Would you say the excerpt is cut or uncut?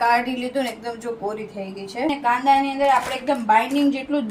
cut